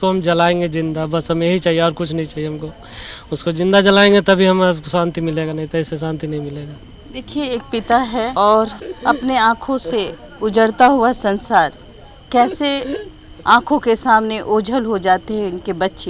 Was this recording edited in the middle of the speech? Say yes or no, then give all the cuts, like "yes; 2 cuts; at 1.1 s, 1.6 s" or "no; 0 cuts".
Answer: no; 0 cuts